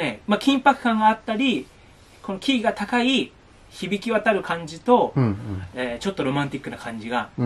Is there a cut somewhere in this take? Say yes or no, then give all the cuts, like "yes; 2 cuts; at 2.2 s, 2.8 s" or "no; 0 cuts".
no; 0 cuts